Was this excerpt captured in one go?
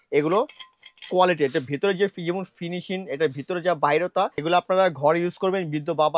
no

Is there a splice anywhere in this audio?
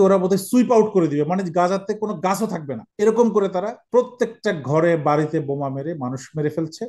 yes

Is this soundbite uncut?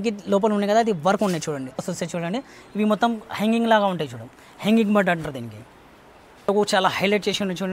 no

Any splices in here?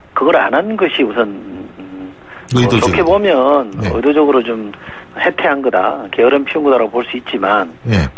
no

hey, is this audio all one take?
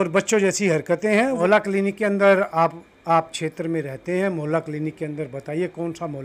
no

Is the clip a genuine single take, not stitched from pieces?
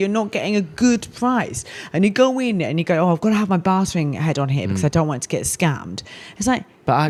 yes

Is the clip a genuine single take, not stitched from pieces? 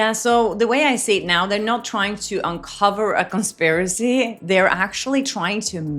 yes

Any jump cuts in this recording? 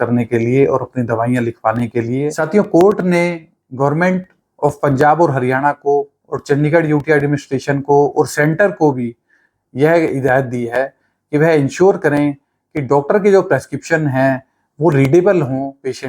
yes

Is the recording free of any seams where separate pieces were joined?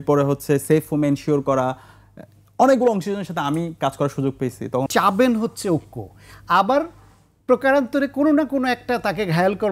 no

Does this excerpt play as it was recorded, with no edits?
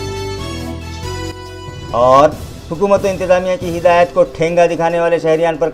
yes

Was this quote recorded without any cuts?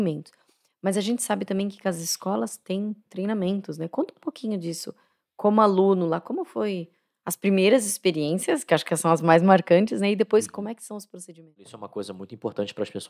no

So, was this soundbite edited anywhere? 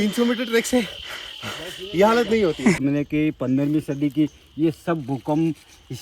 yes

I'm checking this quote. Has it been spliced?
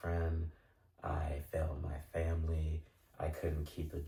no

